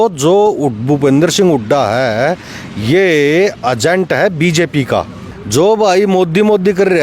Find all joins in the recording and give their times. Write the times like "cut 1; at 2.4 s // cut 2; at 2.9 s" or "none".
cut 1; at 5.6 s